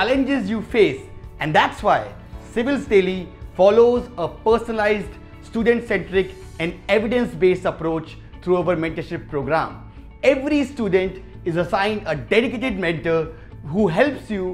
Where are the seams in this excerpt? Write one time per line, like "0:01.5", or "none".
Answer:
none